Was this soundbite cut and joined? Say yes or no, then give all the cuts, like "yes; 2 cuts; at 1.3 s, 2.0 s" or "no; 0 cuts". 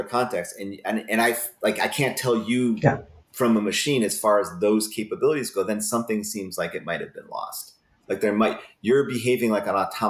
no; 0 cuts